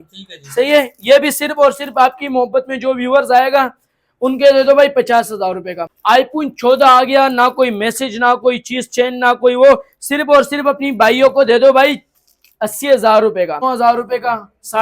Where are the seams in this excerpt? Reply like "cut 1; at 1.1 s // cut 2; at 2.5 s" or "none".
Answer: cut 1; at 5.9 s // cut 2; at 13.6 s